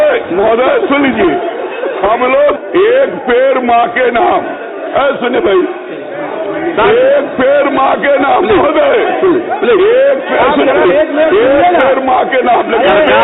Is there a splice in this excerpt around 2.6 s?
yes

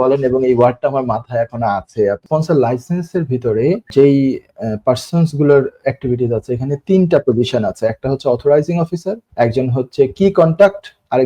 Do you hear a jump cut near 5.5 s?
no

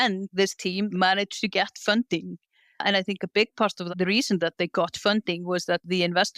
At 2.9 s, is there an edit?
no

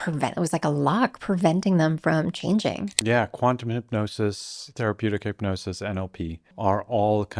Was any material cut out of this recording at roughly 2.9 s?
yes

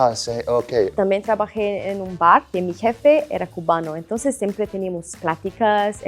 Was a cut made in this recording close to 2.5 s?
no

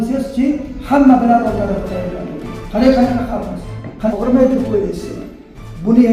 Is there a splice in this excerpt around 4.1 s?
yes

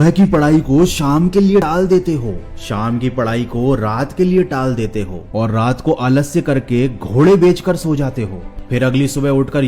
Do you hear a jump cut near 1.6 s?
yes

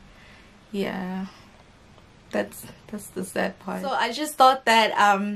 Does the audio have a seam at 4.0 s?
yes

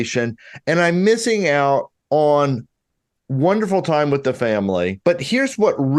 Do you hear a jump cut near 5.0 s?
yes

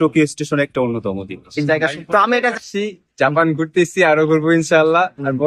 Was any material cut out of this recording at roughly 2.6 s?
yes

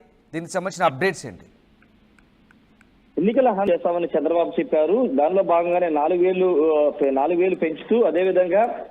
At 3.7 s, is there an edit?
yes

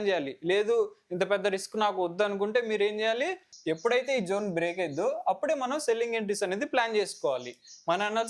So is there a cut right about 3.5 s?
yes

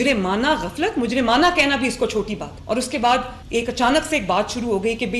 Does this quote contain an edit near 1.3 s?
no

